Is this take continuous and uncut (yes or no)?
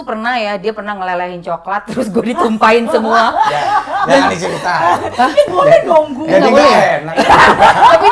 yes